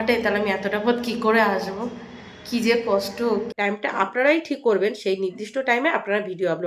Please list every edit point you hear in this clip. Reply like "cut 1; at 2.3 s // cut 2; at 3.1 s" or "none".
cut 1; at 3.5 s